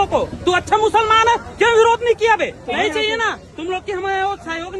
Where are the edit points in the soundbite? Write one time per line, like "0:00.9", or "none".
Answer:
0:02.6